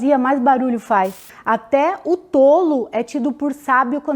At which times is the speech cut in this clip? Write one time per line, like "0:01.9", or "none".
0:01.3